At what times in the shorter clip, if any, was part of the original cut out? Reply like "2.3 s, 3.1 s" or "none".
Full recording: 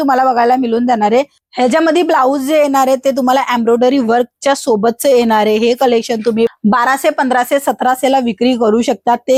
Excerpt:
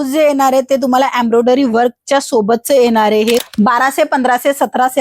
3.4 s